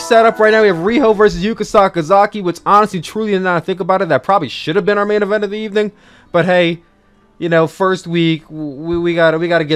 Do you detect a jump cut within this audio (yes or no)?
no